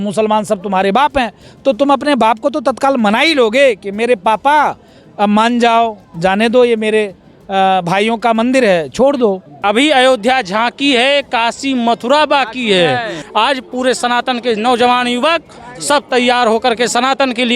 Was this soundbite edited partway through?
yes; 2 cuts; at 9.6 s, 13.2 s

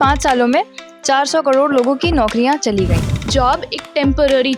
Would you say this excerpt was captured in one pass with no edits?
no; 1 cut; at 3.3 s

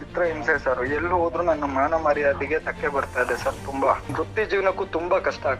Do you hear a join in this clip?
yes; 1 cut; at 4.1 s

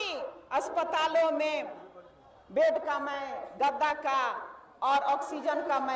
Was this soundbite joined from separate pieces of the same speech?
no; 0 cuts

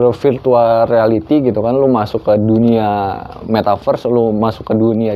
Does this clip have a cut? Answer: no; 0 cuts

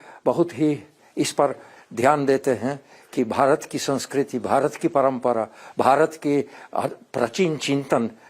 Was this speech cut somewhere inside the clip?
yes; 1 cut; at 1.0 s

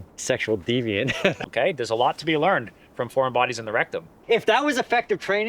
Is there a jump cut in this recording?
yes; 2 cuts; at 1.4 s, 4.2 s

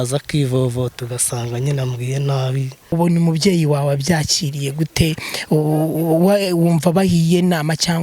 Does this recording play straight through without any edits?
no; 1 cut; at 2.9 s

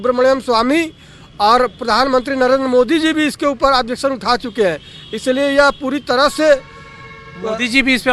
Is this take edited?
no; 0 cuts

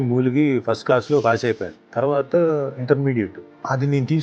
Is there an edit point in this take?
yes; 2 cuts; at 1.7 s, 3.4 s

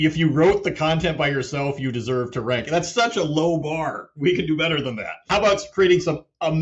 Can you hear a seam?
yes; 1 cut; at 5.3 s

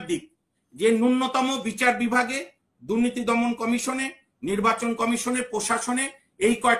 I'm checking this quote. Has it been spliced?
no; 0 cuts

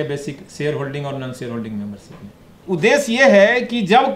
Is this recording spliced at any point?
yes; 1 cut; at 2.5 s

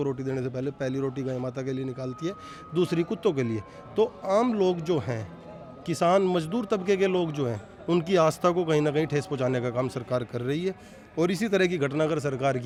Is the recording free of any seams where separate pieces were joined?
yes; 0 cuts

